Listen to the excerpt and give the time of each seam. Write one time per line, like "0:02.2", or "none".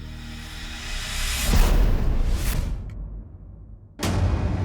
0:02.7